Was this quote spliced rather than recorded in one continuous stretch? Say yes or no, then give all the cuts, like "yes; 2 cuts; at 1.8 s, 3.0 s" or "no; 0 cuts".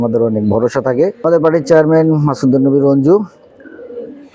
yes; 1 cut; at 1.2 s